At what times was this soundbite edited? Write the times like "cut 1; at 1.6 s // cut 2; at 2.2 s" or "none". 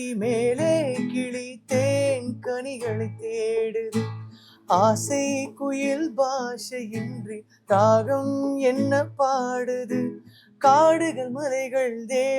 none

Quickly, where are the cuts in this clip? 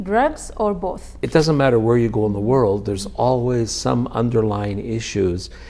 cut 1; at 1.2 s

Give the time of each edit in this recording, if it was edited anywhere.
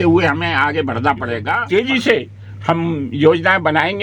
cut 1; at 1.5 s

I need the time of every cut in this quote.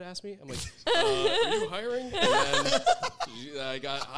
none

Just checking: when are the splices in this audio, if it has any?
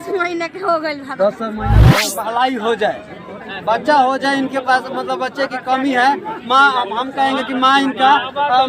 cut 1; at 1.9 s

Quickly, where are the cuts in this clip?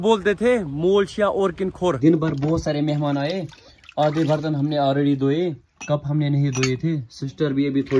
cut 1; at 2.0 s

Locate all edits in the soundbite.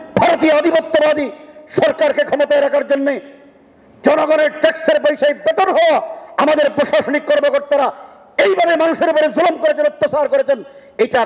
none

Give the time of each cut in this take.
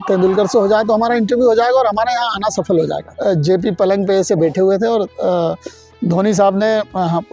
cut 1; at 3.1 s

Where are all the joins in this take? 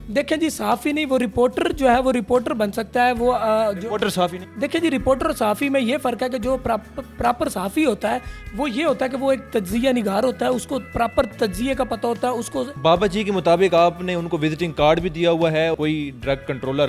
cut 1; at 12.7 s // cut 2; at 15.7 s

